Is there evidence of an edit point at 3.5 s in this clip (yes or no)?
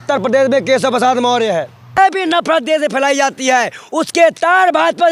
no